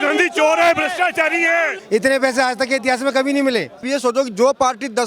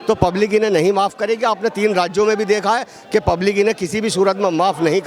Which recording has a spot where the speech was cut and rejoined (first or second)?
first